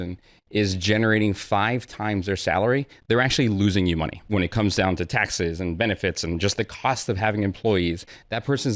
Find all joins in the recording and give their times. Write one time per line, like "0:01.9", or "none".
0:04.2